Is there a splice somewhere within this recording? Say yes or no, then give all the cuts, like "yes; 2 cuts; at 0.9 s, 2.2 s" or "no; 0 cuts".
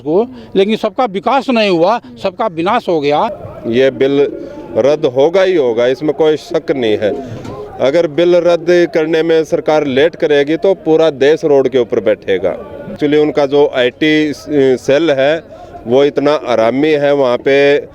yes; 2 cuts; at 3.4 s, 13.0 s